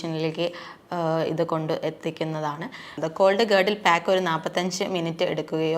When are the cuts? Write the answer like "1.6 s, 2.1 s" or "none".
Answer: 3.0 s